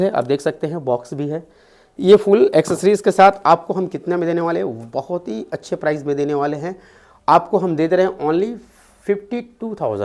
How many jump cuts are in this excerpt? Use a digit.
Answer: 0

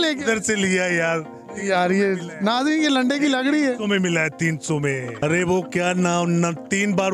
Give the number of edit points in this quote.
1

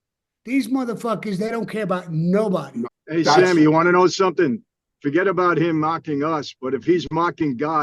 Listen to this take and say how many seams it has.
1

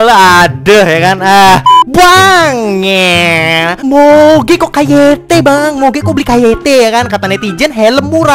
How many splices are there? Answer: 0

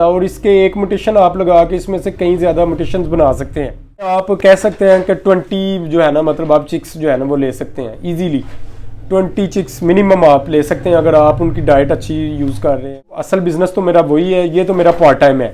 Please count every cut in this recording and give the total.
2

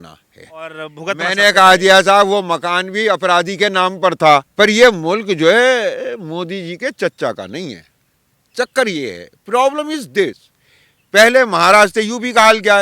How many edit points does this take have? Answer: 2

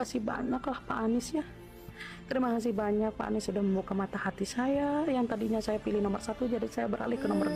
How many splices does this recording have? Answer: 0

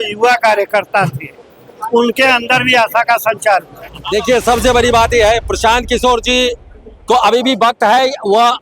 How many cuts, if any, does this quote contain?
1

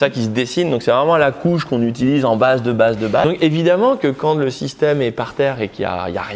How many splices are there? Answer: 1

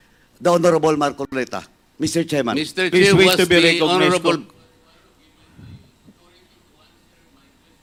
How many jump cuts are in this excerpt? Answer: 0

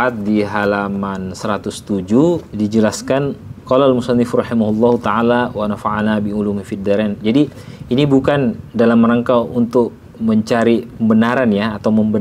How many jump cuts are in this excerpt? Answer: 2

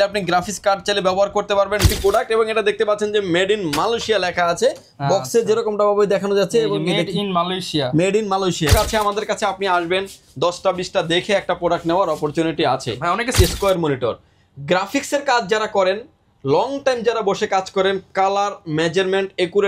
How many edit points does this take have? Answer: 3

